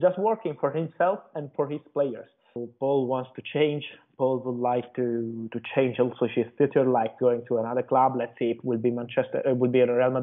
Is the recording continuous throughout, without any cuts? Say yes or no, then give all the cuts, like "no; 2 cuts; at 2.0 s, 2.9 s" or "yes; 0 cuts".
no; 1 cut; at 2.7 s